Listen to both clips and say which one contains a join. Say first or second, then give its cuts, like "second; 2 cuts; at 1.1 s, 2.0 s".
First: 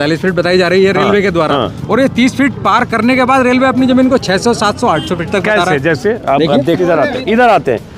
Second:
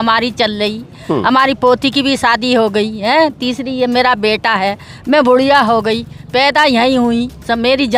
first; 1 cut; at 6.8 s